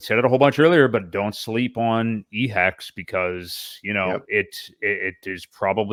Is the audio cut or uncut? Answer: uncut